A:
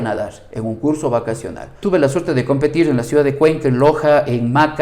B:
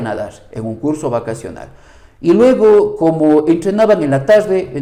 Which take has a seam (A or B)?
A